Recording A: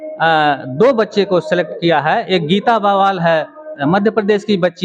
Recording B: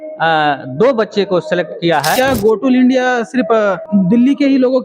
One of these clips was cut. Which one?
B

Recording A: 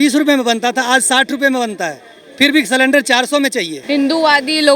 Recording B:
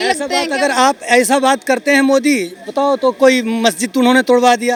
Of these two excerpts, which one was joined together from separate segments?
A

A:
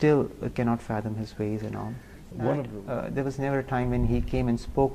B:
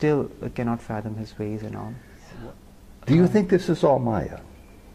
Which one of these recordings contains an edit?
A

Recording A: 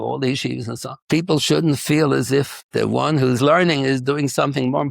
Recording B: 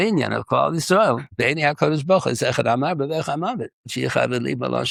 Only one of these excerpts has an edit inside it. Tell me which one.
A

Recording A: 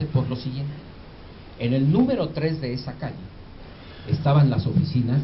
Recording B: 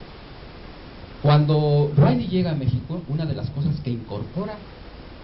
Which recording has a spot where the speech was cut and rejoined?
B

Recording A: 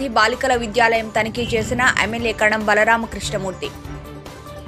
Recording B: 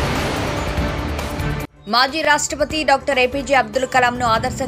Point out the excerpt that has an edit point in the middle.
B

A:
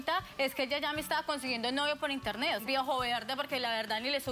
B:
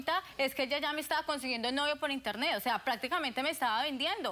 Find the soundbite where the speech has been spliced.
A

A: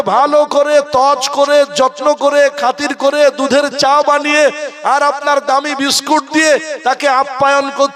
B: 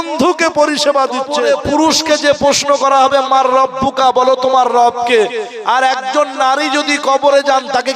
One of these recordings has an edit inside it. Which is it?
B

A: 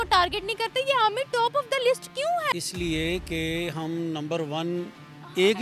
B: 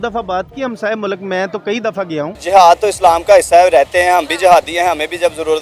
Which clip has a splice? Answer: B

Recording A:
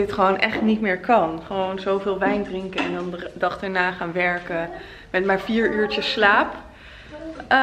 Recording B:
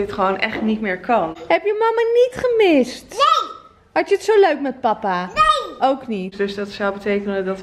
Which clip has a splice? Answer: B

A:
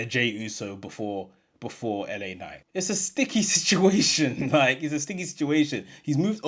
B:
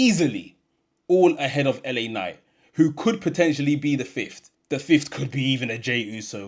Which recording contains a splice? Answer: A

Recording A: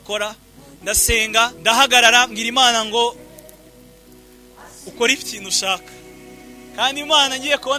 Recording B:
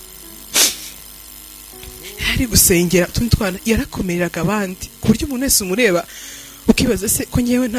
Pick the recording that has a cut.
A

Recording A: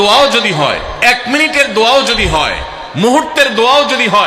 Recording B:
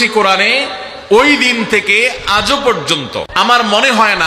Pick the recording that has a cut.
B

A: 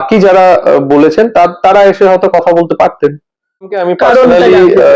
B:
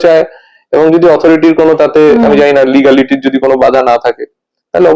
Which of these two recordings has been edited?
A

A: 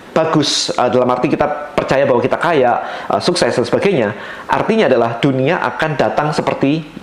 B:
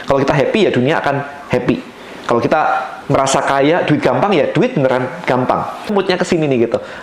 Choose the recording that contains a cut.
B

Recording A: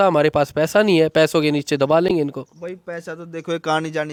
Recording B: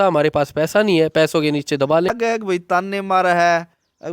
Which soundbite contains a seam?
B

